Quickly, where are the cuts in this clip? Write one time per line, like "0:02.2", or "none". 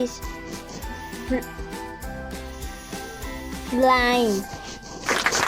0:02.1
0:03.7